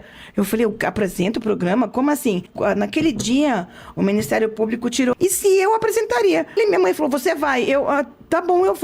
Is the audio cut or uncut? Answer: cut